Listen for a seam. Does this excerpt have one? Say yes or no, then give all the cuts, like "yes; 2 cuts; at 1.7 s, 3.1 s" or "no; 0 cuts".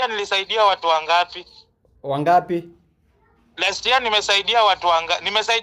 no; 0 cuts